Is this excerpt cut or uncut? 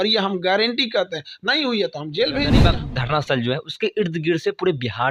cut